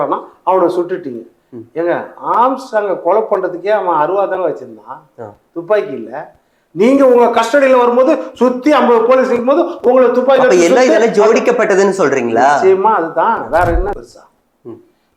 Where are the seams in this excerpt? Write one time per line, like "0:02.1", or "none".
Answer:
0:14.0